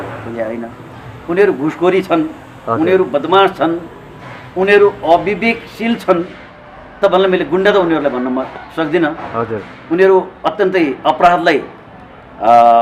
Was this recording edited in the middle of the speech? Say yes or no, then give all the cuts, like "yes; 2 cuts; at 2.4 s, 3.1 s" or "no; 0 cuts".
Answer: no; 0 cuts